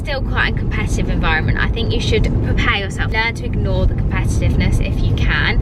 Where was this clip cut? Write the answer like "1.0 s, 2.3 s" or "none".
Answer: none